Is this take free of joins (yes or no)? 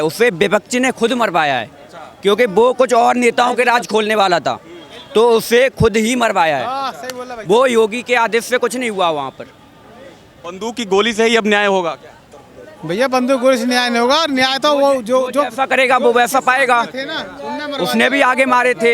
yes